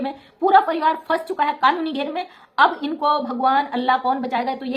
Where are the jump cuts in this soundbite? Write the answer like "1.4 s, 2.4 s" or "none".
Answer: none